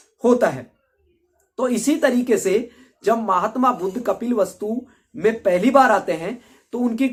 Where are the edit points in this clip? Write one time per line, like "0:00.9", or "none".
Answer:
none